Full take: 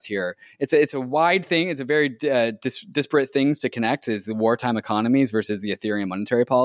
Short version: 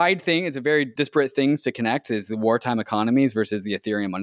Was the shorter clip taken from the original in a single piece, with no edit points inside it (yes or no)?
no